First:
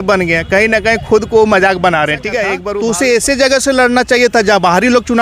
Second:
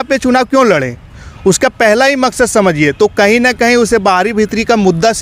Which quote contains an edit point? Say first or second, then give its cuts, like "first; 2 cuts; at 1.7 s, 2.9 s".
first; 1 cut; at 2.6 s